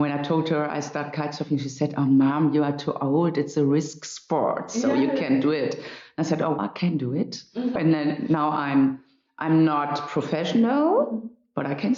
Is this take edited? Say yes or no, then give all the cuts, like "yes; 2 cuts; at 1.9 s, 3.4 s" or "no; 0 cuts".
no; 0 cuts